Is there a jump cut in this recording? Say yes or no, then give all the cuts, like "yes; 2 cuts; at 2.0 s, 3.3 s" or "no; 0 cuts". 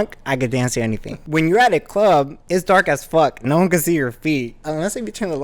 yes; 2 cuts; at 1.2 s, 4.6 s